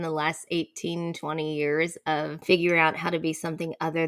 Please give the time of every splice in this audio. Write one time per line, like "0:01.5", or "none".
0:02.4